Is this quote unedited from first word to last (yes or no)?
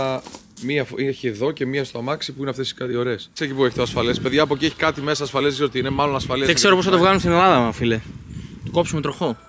no